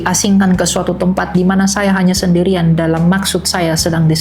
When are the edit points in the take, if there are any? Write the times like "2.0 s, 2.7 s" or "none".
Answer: none